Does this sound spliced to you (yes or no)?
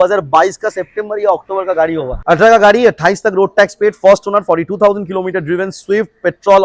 yes